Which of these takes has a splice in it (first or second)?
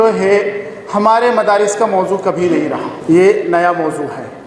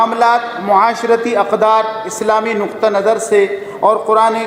first